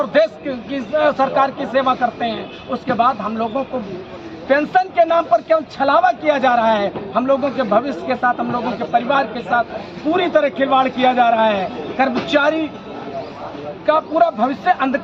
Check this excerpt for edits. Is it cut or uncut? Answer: uncut